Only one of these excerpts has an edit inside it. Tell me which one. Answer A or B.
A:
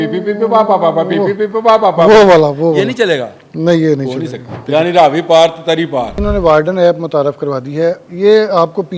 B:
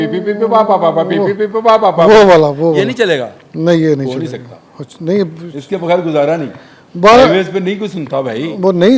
A